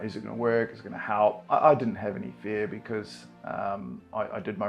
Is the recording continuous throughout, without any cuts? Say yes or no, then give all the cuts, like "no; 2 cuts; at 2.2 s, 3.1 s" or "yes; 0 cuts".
no; 1 cut; at 1.4 s